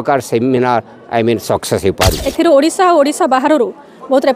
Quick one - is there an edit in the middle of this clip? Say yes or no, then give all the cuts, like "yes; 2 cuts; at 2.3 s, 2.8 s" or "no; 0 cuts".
yes; 1 cut; at 2.3 s